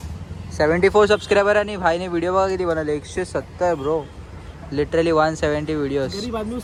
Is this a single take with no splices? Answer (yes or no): yes